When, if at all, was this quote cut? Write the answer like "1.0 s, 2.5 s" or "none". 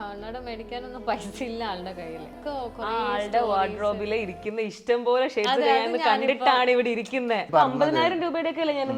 2.4 s, 7.4 s

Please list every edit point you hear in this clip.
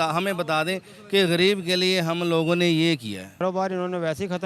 3.4 s

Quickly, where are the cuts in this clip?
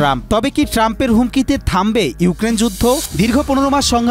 3.1 s

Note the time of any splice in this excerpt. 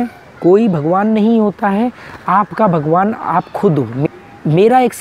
4.1 s

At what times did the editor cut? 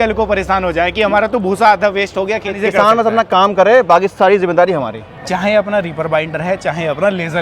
2.5 s, 5.1 s

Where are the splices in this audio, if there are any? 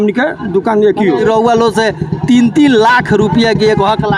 1.2 s

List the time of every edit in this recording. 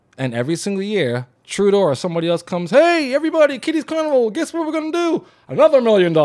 1.4 s

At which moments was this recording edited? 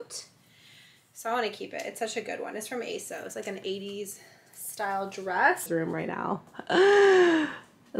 5.7 s

